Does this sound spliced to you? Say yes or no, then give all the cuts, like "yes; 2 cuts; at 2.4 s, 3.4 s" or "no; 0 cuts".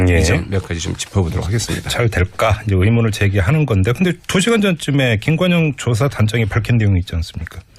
yes; 1 cut; at 2.5 s